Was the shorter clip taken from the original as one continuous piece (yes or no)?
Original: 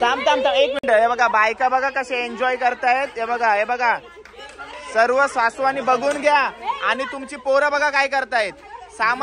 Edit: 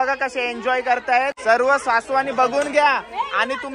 no